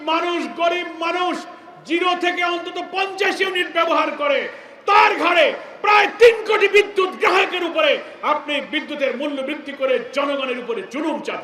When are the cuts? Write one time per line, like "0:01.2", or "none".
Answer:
none